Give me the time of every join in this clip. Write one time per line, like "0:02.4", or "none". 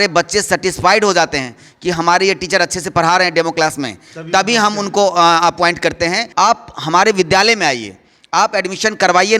0:06.2